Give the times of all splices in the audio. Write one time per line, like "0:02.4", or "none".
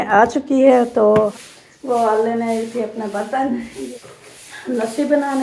0:01.3
0:03.8